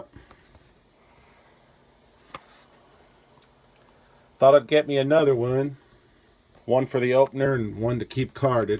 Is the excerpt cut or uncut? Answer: cut